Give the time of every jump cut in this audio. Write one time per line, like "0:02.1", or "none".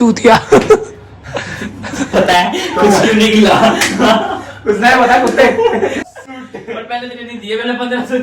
0:06.1